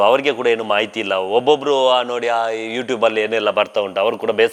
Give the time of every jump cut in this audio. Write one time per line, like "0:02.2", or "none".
none